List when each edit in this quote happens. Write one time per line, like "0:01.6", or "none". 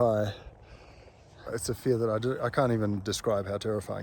0:01.3